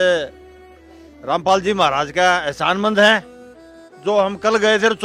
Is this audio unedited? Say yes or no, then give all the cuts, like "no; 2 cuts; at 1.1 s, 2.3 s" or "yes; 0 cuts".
yes; 0 cuts